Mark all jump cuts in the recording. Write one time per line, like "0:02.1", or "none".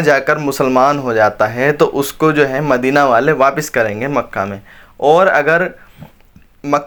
none